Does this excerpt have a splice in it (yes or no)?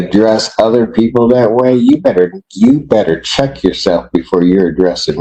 no